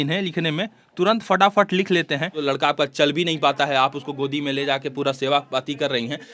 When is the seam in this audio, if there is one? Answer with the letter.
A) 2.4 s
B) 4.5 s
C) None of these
A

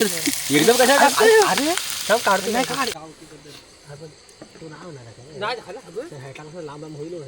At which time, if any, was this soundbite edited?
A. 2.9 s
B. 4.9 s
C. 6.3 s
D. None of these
A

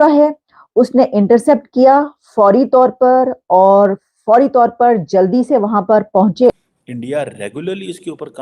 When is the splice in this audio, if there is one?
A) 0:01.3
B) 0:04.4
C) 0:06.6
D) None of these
C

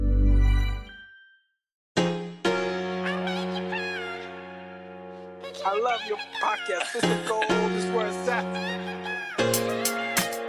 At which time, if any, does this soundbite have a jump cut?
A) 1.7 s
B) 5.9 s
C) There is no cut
A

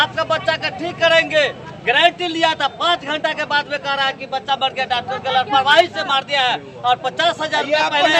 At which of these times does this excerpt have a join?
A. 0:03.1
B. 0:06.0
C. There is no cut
C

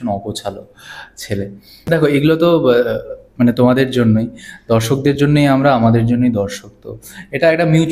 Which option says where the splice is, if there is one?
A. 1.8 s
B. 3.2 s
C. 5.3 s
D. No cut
A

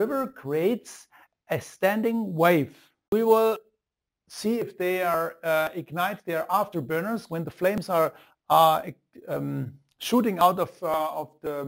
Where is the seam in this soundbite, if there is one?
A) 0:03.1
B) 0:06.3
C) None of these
A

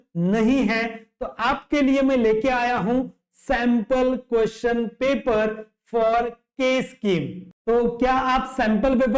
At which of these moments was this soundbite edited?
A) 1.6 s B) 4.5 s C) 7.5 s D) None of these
C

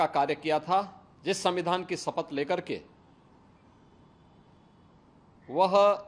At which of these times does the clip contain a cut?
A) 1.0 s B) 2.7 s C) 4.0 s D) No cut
A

